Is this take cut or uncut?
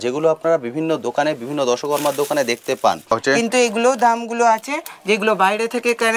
cut